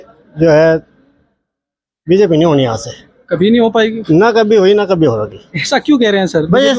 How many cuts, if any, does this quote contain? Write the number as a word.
zero